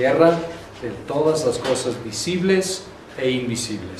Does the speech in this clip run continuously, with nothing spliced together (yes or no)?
yes